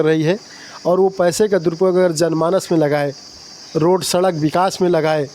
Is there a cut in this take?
no; 0 cuts

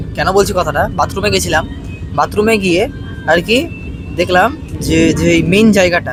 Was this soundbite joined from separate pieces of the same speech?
no; 0 cuts

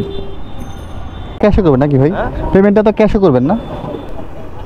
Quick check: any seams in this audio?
yes; 1 cut; at 1.4 s

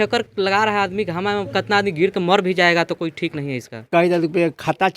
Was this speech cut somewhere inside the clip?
yes; 1 cut; at 3.9 s

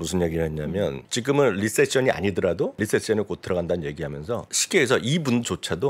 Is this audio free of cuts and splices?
no; 3 cuts; at 1.1 s, 2.8 s, 4.5 s

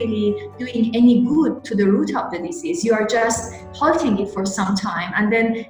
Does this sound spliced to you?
no; 0 cuts

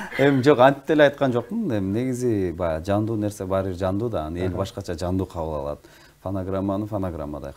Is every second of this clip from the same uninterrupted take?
yes; 0 cuts

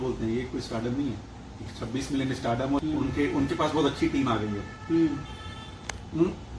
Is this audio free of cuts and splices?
no; 1 cut; at 2.8 s

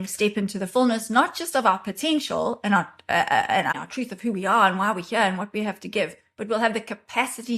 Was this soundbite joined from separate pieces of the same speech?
yes; 1 cut; at 3.7 s

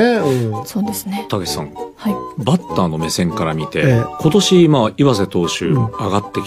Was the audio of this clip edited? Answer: yes; 1 cut; at 3.6 s

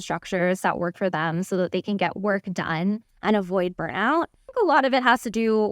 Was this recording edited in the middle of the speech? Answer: yes; 1 cut; at 4.5 s

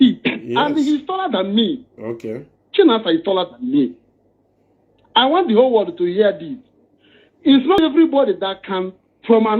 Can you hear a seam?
yes; 1 cut; at 7.8 s

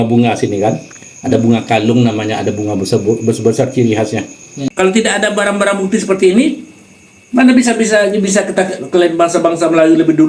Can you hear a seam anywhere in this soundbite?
yes; 1 cut; at 4.6 s

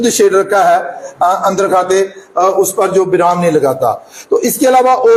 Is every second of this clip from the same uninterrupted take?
yes; 0 cuts

